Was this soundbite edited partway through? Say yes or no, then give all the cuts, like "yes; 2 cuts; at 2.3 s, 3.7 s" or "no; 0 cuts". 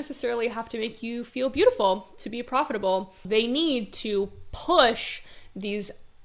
yes; 1 cut; at 3.2 s